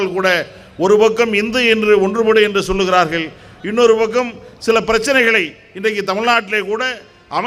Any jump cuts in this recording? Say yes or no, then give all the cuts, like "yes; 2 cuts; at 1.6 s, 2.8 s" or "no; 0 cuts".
no; 0 cuts